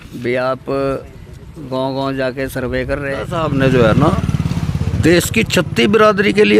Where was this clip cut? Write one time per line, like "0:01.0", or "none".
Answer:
0:03.4